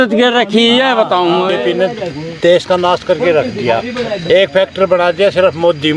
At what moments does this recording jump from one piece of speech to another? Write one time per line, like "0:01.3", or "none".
0:01.5
0:04.2